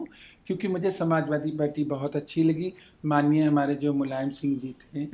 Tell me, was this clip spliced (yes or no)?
no